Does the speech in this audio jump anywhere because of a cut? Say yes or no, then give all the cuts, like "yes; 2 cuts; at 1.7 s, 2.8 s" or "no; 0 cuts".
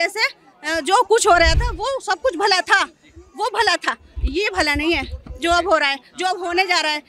no; 0 cuts